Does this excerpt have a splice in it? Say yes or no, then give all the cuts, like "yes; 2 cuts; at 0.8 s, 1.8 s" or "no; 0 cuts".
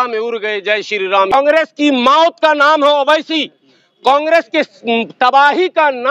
yes; 1 cut; at 1.3 s